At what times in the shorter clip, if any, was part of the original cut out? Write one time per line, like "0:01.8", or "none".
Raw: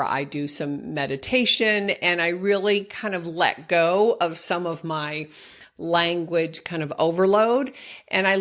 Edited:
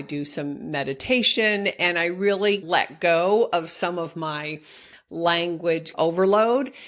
0:02.6
0:05.9